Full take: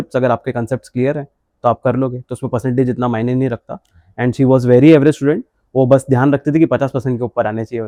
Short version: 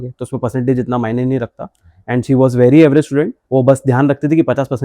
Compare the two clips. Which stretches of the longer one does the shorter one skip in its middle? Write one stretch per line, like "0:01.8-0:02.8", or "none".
0:05.5-0:05.6